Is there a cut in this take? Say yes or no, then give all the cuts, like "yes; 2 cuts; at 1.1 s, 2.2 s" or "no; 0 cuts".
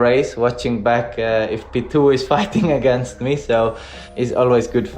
yes; 1 cut; at 4.0 s